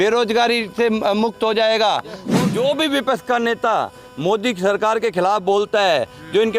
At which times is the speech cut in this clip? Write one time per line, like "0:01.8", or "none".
0:02.3